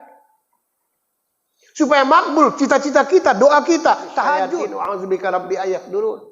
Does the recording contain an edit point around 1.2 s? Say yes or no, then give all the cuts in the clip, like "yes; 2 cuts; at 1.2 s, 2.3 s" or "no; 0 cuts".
no; 1 cut; at 4.8 s